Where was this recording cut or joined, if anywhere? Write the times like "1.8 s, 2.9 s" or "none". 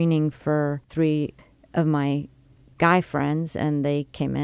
1.2 s